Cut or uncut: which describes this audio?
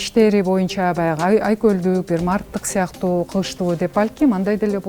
uncut